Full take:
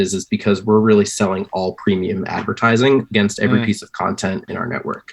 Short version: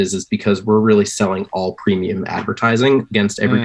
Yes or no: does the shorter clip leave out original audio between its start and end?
no